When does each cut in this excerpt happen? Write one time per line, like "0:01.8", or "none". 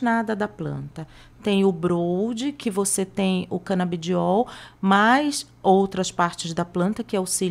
none